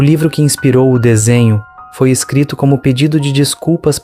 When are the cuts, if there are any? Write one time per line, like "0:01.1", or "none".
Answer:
none